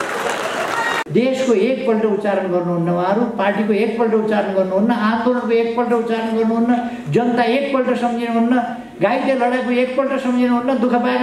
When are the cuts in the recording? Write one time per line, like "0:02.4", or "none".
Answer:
0:01.0

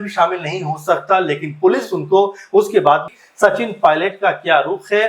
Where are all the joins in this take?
0:03.1

